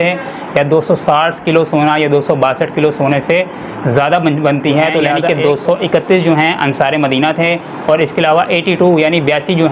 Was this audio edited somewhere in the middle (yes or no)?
yes